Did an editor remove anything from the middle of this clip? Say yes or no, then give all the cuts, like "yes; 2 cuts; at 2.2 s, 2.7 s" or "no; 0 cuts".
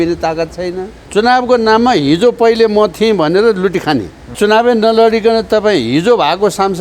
yes; 2 cuts; at 0.9 s, 4.3 s